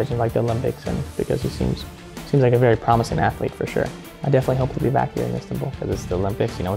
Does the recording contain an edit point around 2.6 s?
no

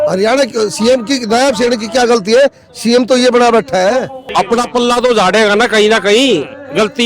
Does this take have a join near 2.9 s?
no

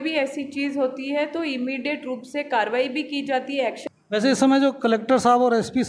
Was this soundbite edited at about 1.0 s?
no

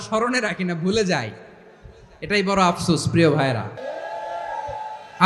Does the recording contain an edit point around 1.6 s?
no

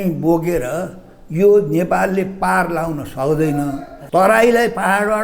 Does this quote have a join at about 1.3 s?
no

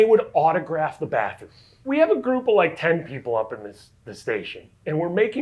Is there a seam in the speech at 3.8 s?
no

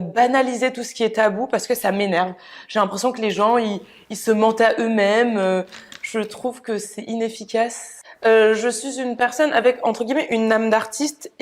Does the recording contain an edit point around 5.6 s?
no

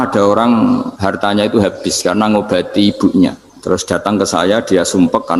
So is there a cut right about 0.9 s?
yes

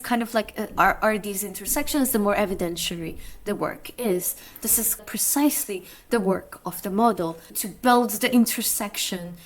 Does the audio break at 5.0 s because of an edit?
yes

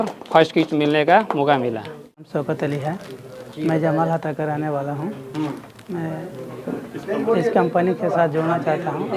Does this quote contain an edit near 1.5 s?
no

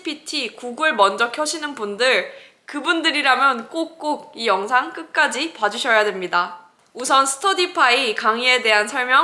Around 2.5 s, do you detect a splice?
no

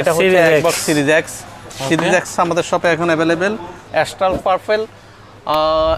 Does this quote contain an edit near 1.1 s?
no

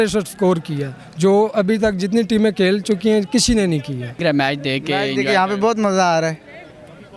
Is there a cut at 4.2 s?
yes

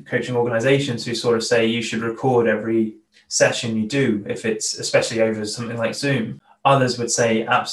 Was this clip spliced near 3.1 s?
yes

